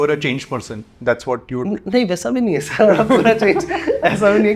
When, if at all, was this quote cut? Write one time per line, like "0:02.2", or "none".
none